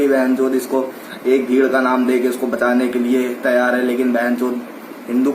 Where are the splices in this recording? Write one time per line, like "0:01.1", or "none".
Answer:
none